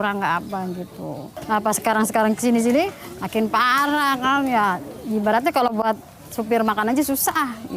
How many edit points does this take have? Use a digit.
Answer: 1